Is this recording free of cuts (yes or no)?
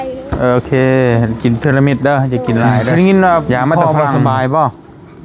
no